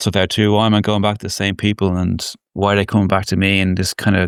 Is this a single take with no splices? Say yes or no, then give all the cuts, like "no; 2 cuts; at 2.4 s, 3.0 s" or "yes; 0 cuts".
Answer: yes; 0 cuts